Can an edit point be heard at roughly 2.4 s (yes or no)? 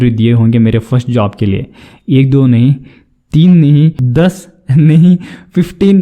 no